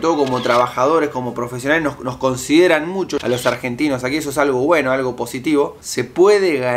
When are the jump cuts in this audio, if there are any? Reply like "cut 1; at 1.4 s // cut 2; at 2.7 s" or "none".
cut 1; at 3.2 s // cut 2; at 5.8 s